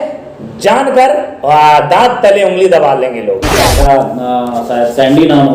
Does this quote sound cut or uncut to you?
cut